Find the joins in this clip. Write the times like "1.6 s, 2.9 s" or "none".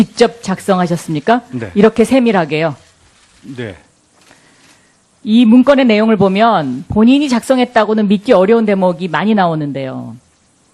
none